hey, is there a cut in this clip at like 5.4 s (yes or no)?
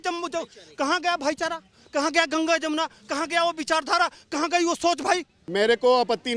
yes